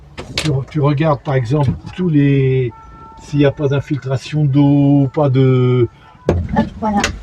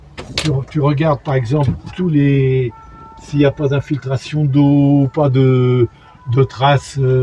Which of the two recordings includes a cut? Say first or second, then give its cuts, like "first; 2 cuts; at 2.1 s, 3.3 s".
first; 1 cut; at 6.1 s